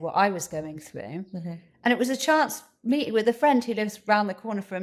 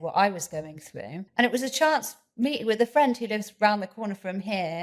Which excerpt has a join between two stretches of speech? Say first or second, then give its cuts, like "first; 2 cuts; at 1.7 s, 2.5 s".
second; 1 cut; at 1.2 s